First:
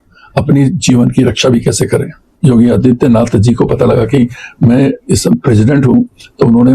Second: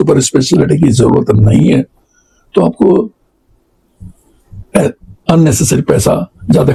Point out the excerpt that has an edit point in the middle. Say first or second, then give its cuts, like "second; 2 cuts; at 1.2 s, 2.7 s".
first; 1 cut; at 2.3 s